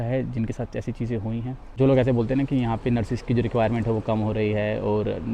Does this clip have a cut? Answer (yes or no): yes